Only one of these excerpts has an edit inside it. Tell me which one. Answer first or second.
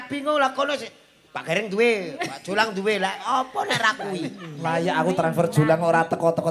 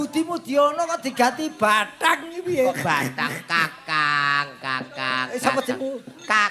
first